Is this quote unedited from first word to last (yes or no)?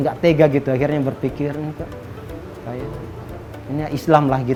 yes